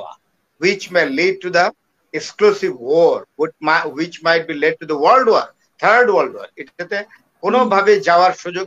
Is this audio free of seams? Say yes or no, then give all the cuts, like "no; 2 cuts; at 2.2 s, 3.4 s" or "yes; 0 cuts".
yes; 0 cuts